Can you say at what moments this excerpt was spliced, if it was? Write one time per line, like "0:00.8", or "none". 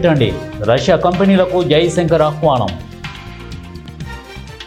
none

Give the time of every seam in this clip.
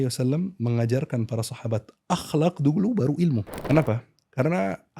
0:03.5

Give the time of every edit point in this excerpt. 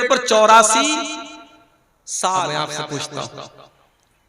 0:02.7

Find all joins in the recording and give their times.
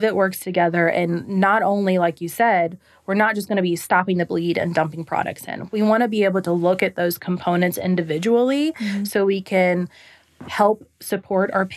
none

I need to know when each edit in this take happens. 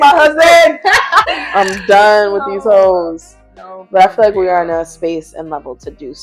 none

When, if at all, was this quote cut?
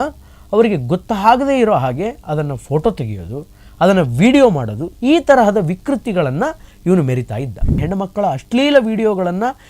0:07.8

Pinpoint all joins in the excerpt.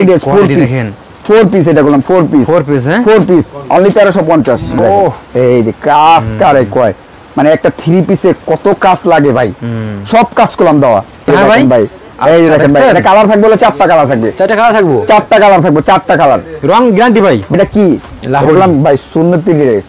0:04.8
0:11.3
0:17.5

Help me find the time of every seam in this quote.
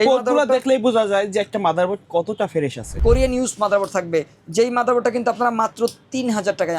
0:02.9

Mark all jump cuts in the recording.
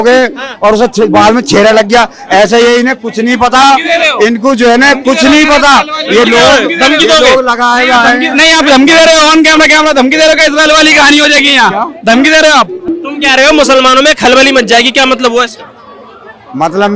0:12.9

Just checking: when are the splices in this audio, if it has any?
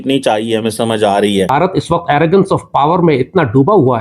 0:01.5

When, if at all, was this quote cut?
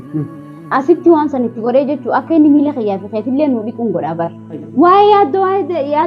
0:04.7

